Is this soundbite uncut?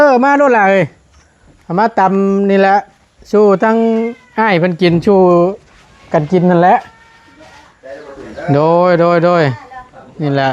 yes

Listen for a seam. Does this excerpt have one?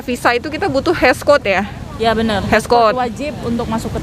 no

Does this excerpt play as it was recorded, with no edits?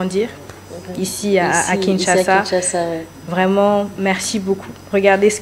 yes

